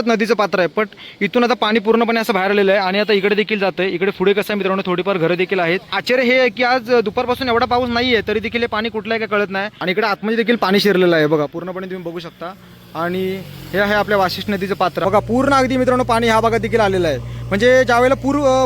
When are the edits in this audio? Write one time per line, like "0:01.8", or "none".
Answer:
0:06.0
0:09.7
0:15.0